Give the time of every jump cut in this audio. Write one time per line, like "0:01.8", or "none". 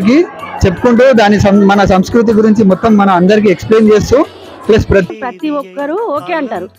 0:05.1